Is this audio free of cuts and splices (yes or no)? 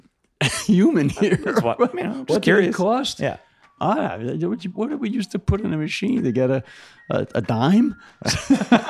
no